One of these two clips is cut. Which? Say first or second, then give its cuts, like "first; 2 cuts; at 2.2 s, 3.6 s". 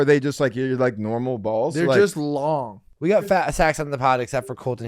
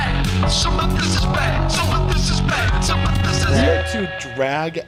first; 1 cut; at 2.8 s